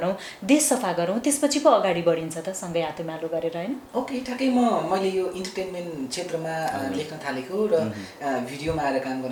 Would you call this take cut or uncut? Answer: uncut